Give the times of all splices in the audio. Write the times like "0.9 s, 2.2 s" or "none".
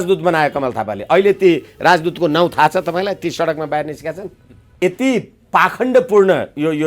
4.8 s